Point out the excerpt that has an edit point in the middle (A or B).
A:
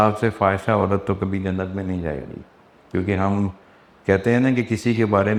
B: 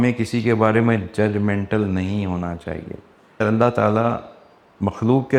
B